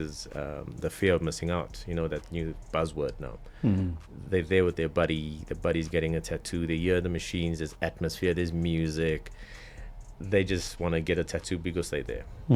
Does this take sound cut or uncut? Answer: uncut